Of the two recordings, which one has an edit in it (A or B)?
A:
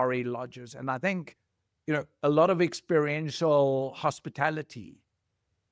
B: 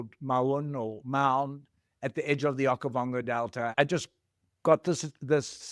B